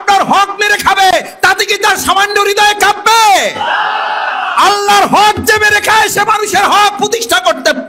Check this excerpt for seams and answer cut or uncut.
uncut